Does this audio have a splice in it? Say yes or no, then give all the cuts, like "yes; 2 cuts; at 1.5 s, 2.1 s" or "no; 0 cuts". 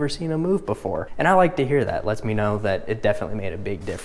yes; 1 cut; at 1.1 s